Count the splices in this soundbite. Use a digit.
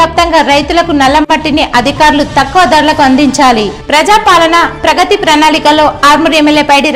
0